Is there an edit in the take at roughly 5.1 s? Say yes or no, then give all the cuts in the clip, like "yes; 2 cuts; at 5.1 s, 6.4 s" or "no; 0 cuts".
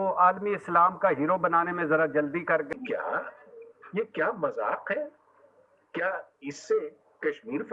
no; 1 cut; at 2.7 s